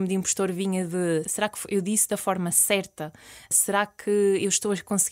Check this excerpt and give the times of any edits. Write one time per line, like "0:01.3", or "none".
0:01.3
0:03.5